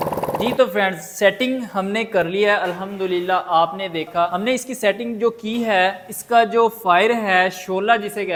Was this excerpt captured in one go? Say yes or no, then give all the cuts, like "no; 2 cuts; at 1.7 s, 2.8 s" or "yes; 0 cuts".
yes; 0 cuts